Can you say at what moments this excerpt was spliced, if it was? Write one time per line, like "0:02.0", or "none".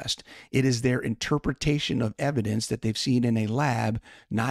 none